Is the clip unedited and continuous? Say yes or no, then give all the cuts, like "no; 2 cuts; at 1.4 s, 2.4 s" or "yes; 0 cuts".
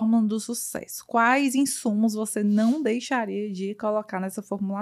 yes; 0 cuts